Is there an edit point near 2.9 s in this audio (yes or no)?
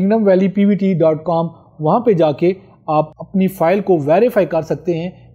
no